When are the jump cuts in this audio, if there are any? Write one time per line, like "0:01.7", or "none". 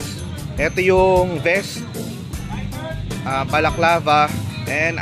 none